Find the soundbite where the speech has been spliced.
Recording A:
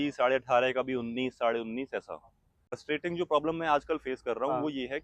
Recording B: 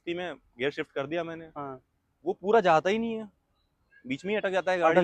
A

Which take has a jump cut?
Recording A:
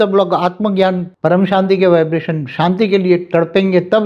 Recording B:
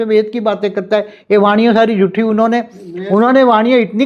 A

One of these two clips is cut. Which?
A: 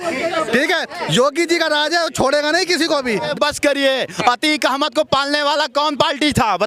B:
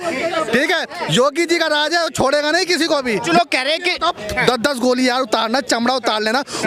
A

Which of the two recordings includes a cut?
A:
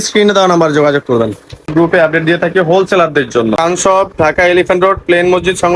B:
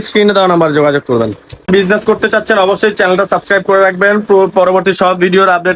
A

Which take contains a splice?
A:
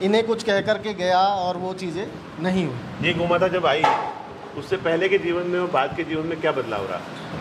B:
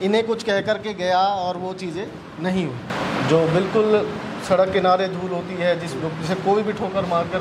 B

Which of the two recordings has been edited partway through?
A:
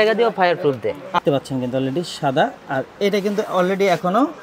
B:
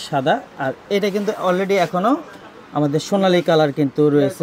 A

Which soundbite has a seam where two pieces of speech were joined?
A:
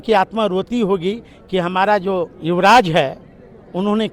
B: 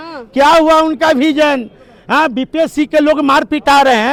A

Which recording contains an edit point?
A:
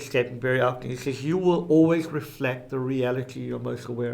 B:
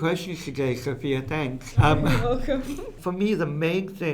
B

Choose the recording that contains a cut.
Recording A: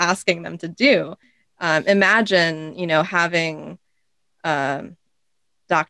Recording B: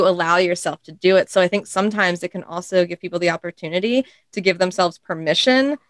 A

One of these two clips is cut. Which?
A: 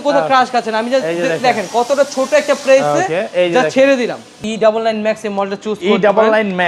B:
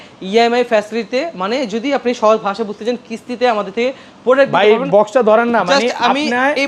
A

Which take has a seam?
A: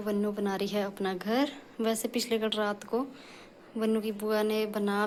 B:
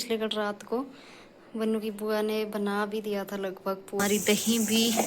B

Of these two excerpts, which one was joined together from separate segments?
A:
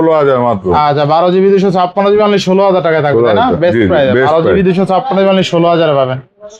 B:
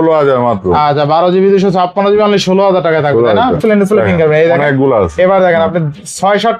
B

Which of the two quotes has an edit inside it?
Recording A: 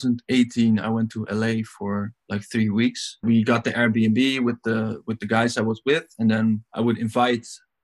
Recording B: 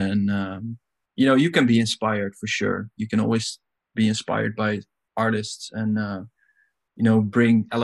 A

